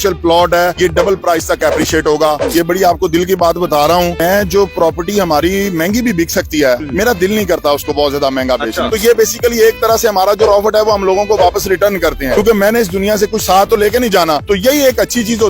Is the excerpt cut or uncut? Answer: cut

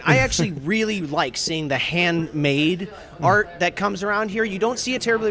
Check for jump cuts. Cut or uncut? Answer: uncut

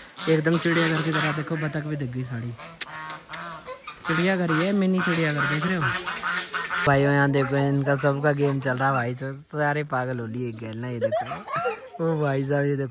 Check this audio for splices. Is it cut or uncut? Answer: cut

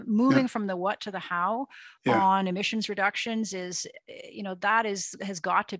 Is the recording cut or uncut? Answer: uncut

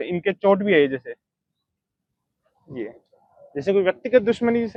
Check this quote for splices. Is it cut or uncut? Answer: uncut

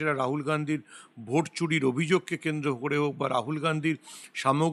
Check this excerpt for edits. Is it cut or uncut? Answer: uncut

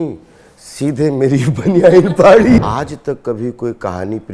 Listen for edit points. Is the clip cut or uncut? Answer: cut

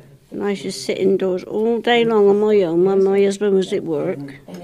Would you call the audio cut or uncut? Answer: uncut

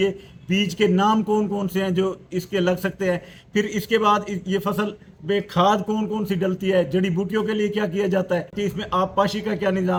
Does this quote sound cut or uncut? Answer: uncut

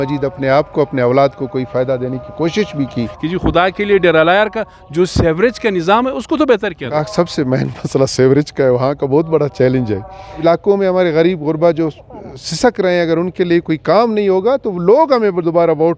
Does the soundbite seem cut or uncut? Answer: cut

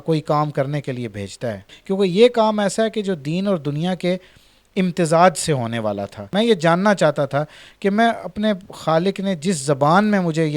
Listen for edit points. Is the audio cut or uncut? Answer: cut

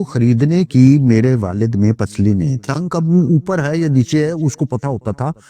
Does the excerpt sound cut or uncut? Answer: cut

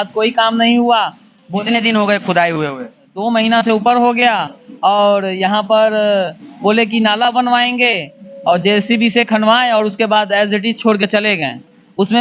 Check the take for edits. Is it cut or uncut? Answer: uncut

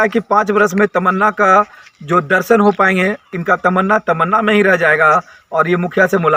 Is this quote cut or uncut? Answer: uncut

